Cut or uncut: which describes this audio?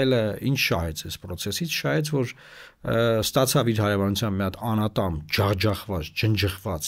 uncut